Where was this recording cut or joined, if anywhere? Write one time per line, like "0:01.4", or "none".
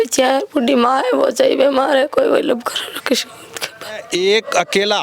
0:04.0